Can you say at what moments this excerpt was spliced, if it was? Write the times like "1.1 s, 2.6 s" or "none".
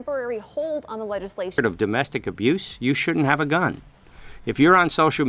1.5 s